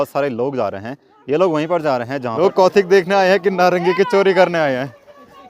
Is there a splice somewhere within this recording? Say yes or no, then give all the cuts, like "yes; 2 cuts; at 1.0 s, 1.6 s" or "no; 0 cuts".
yes; 1 cut; at 2.4 s